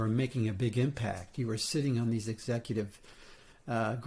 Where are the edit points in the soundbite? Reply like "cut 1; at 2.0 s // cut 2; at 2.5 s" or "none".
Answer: none